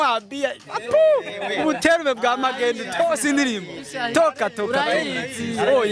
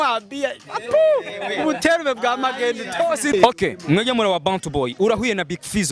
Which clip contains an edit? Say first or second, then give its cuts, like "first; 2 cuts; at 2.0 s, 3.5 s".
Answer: second; 1 cut; at 3.3 s